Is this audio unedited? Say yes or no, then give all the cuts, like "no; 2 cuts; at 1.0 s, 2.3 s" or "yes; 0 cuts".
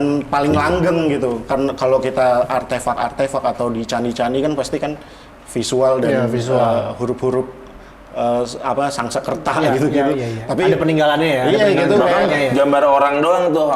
yes; 0 cuts